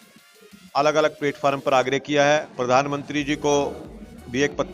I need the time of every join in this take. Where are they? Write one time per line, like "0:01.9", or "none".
0:02.5